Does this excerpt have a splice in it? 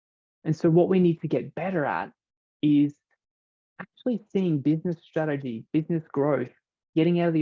yes; 1 cut; at 5.6 s

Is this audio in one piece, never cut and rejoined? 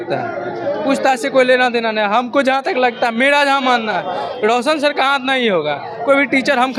yes; 0 cuts

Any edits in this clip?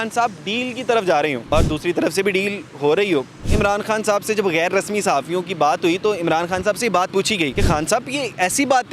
yes; 3 cuts; at 1.5 s, 3.4 s, 7.5 s

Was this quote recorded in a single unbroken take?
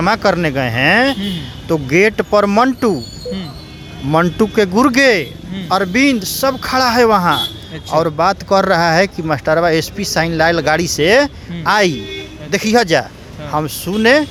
yes; 0 cuts

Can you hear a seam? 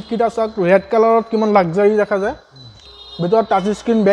no; 0 cuts

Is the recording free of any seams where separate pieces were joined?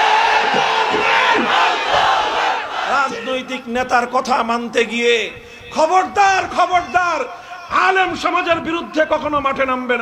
no; 1 cut; at 2.8 s

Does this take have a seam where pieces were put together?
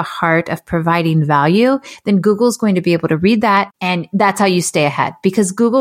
yes; 1 cut; at 3.8 s

